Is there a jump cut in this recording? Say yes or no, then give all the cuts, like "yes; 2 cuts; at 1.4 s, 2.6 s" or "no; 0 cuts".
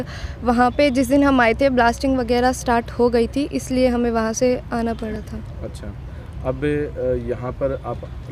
no; 0 cuts